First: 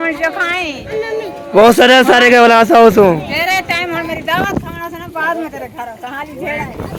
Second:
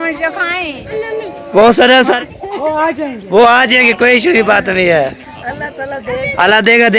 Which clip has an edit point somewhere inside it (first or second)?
second